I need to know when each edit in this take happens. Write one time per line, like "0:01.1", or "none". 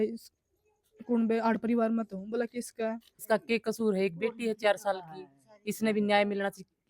0:03.1